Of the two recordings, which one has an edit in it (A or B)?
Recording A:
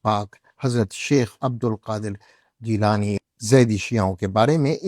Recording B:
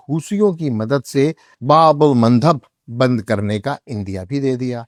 A